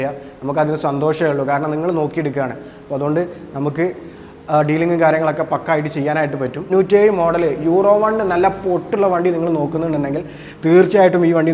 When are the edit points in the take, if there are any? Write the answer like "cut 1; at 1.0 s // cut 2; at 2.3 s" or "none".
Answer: cut 1; at 6.7 s